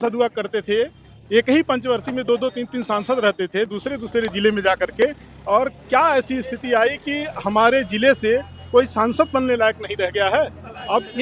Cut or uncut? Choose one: uncut